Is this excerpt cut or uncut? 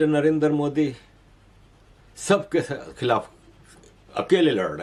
uncut